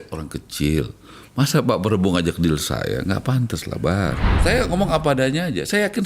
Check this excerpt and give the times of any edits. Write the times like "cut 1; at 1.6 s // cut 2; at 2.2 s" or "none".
cut 1; at 4.4 s

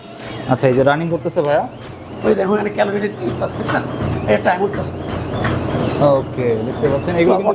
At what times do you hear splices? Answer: none

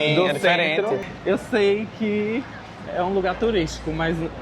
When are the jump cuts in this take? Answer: cut 1; at 1.1 s

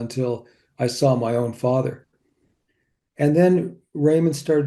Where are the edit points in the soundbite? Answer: cut 1; at 2.7 s

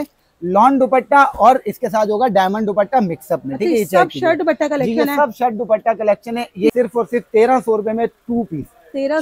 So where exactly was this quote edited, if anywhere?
cut 1; at 6.7 s

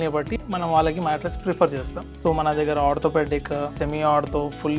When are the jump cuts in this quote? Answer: cut 1; at 2.0 s // cut 2; at 3.7 s

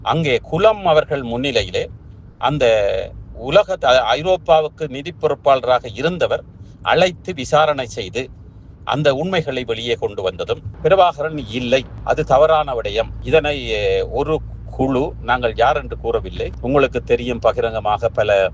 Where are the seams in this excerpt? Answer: cut 1; at 10.7 s

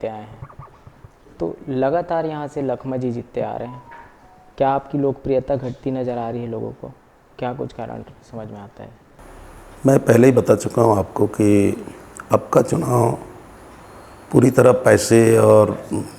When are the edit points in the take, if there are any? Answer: none

